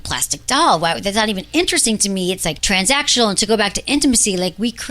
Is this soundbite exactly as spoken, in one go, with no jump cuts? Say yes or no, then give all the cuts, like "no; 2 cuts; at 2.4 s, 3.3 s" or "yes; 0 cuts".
no; 1 cut; at 2.6 s